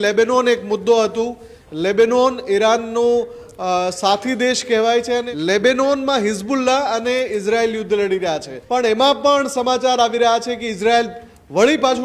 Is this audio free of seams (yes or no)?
no